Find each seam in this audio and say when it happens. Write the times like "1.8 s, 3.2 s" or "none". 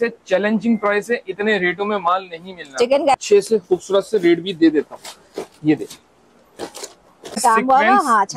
3.1 s, 7.4 s